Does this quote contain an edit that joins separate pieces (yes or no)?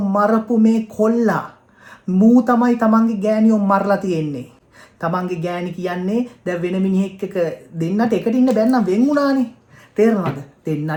no